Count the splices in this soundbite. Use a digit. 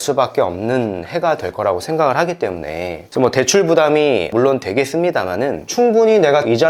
1